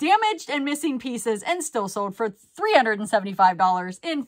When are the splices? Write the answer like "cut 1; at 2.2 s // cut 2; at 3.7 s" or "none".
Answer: none